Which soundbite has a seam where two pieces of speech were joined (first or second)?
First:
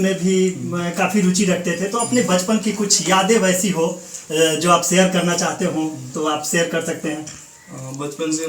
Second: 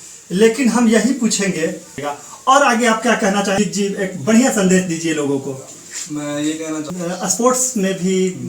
second